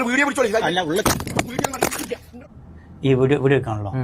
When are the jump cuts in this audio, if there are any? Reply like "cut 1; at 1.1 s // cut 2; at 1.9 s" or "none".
cut 1; at 2.5 s